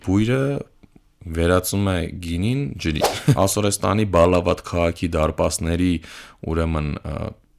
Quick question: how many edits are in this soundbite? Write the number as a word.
one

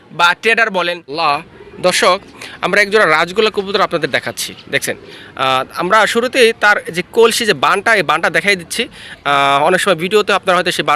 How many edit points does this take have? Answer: one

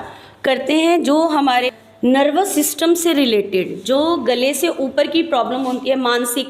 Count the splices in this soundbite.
one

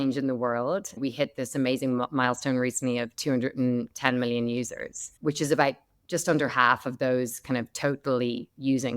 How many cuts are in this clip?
one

